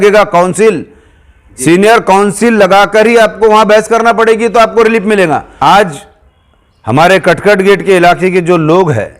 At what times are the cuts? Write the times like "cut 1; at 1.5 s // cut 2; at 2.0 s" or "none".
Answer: cut 1; at 5.5 s